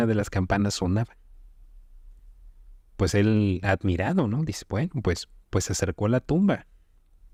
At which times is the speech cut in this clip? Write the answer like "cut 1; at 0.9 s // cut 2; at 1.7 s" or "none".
none